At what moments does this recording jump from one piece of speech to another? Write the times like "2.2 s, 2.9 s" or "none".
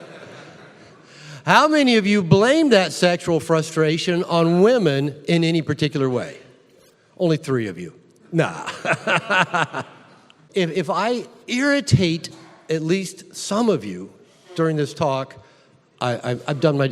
10.4 s